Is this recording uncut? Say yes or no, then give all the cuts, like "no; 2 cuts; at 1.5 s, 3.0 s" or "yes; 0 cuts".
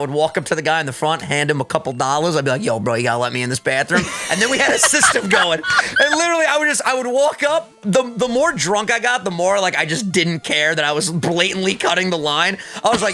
yes; 0 cuts